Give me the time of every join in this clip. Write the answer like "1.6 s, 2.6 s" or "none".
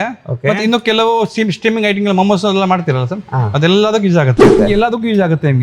4.6 s